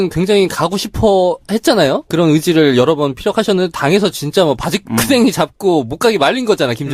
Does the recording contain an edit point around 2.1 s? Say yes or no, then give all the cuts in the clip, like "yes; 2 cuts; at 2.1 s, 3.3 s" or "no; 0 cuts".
yes; 1 cut; at 2.1 s